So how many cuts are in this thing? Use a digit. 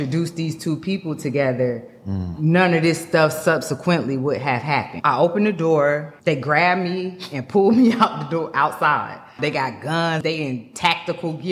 4